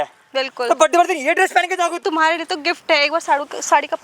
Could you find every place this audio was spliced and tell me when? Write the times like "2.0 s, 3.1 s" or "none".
2.0 s